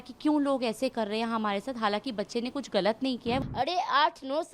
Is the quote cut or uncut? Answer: cut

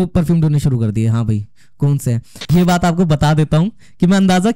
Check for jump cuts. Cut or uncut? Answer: cut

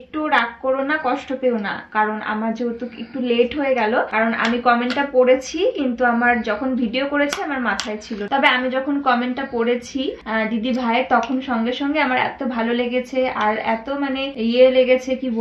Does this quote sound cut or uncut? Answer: uncut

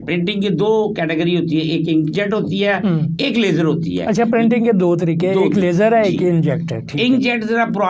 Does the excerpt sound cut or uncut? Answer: uncut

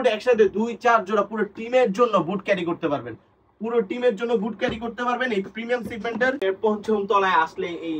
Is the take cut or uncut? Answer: cut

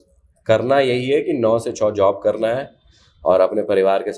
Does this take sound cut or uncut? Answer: uncut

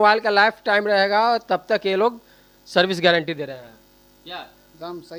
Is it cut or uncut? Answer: uncut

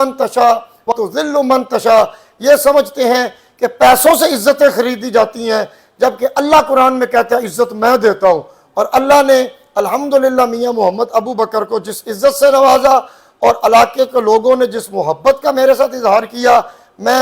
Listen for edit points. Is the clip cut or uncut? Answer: cut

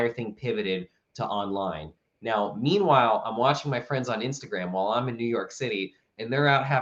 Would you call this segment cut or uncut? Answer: uncut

